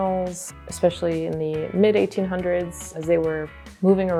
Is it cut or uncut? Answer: uncut